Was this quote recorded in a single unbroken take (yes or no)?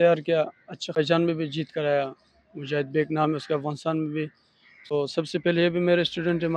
no